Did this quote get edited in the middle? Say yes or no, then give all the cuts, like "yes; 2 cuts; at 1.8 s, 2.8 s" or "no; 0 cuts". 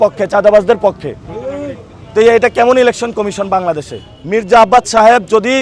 no; 0 cuts